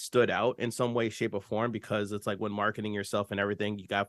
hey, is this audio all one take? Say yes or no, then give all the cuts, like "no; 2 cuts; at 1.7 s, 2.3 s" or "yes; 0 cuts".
yes; 0 cuts